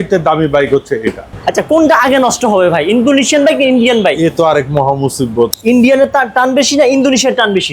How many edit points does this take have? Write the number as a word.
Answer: two